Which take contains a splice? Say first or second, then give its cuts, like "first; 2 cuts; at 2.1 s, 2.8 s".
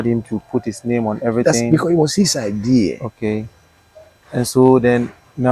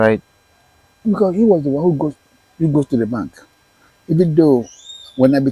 second; 1 cut; at 1.0 s